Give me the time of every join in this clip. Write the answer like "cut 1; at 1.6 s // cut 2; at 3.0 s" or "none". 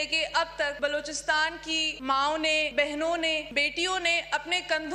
cut 1; at 0.7 s // cut 2; at 1.9 s // cut 3; at 2.7 s // cut 4; at 3.5 s